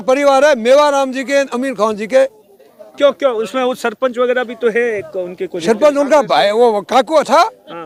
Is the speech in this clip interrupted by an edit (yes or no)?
no